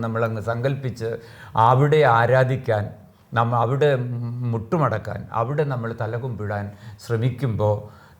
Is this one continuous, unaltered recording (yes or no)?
yes